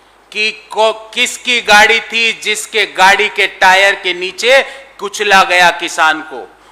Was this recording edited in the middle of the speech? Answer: no; 0 cuts

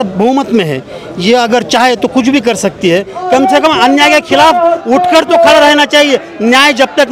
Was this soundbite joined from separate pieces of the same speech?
yes; 1 cut; at 3.2 s

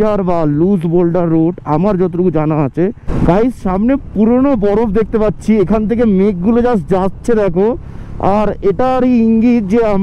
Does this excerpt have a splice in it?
yes; 1 cut; at 3.0 s

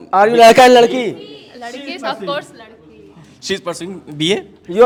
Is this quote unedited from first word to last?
yes; 0 cuts

